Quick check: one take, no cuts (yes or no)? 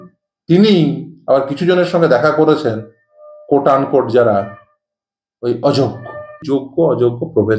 no